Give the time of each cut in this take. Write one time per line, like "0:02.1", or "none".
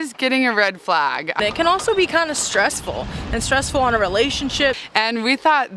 0:01.4
0:04.8